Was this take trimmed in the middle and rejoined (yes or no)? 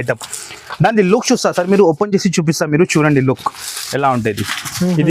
no